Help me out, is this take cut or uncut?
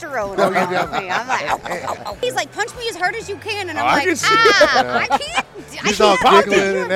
cut